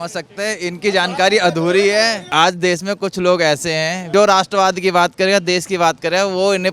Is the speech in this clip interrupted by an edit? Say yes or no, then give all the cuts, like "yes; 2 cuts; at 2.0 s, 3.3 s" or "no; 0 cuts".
yes; 2 cuts; at 2.2 s, 4.1 s